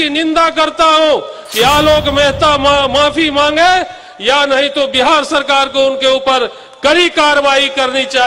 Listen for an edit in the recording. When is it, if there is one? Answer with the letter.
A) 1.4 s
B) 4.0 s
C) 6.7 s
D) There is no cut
D